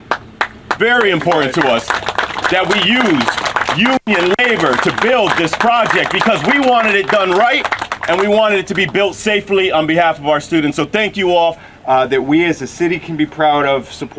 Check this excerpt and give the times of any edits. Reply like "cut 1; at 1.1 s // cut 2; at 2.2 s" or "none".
cut 1; at 11.6 s